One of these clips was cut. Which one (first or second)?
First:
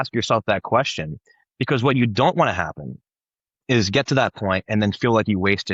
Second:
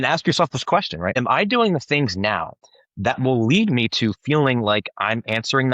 second